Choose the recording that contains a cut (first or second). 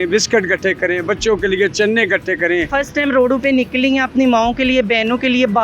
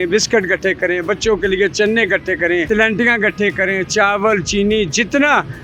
first